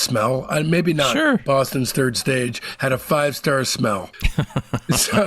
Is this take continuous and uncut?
no; 1 cut; at 1.4 s

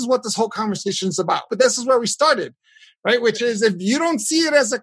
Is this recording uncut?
no; 1 cut; at 1.5 s

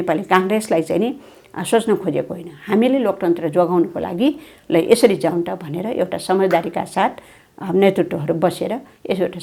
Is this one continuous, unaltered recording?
yes; 0 cuts

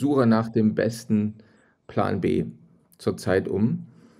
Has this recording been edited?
no; 0 cuts

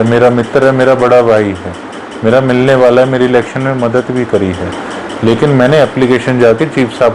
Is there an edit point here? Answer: no; 0 cuts

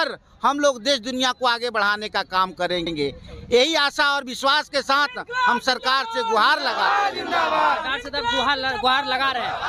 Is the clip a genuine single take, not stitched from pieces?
yes; 0 cuts

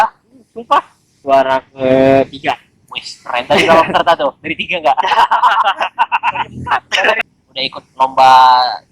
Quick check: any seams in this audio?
yes; 2 cuts; at 1.1 s, 7.2 s

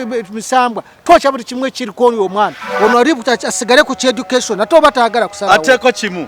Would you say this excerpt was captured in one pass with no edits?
no; 1 cut; at 2.6 s

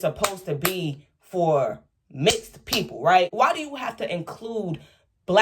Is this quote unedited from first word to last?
no; 1 cut; at 3.3 s

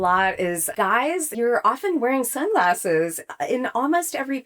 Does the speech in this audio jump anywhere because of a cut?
yes; 1 cut; at 1.3 s

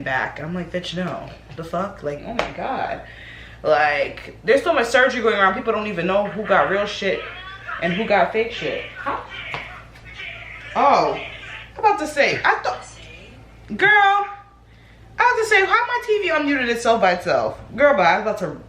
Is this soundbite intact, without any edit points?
no; 1 cut; at 2.2 s

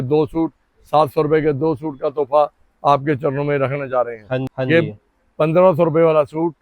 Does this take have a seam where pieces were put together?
yes; 1 cut; at 4.5 s

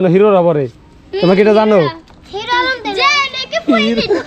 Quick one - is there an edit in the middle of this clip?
no; 0 cuts

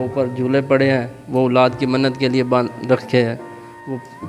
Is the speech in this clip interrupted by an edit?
no; 0 cuts

